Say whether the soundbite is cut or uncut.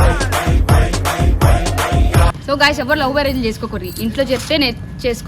cut